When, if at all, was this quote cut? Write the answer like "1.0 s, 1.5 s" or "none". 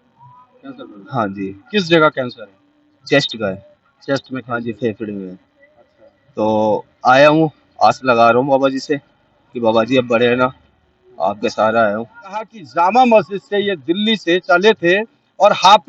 12.6 s

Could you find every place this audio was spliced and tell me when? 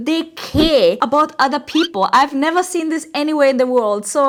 none

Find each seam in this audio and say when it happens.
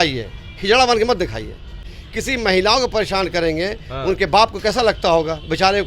1.8 s

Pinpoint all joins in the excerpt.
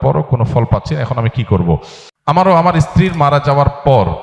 2.0 s

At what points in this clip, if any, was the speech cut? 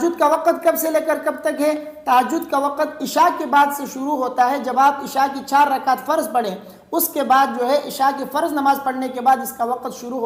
none

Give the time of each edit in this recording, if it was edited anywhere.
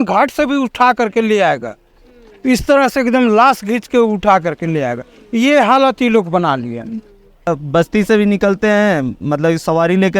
7.5 s

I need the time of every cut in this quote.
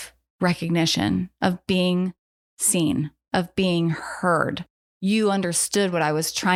none

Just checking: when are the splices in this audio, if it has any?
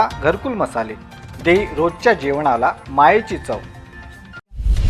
none

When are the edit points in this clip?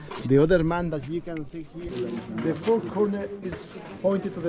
1.8 s

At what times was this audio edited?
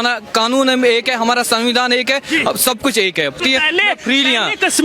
3.4 s

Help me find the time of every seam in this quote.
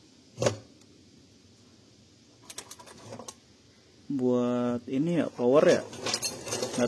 none

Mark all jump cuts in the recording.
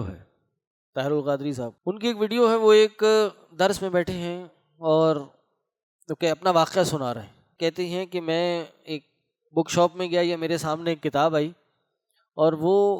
1.8 s, 7.4 s

